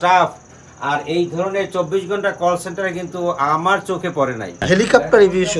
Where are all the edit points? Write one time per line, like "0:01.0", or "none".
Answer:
0:04.5